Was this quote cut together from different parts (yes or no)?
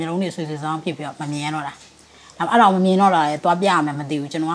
no